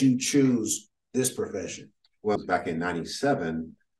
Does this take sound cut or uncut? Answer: cut